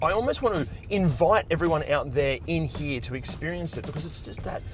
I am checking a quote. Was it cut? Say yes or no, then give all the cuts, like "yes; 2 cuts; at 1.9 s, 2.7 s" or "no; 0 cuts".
no; 0 cuts